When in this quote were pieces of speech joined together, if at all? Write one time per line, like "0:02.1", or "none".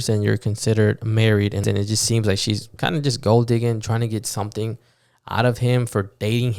0:01.6